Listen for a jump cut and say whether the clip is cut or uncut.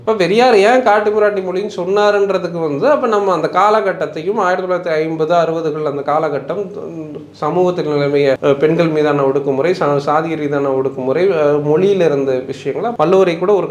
cut